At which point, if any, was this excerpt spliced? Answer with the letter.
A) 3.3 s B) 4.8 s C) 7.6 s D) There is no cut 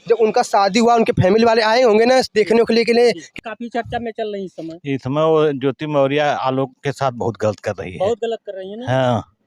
A